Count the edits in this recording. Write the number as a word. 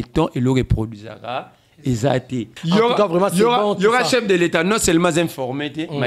one